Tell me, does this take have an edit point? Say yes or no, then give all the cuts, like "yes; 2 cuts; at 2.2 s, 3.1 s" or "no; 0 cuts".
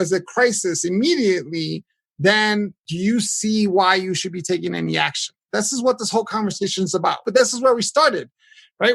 yes; 3 cuts; at 2.8 s, 5.4 s, 7.2 s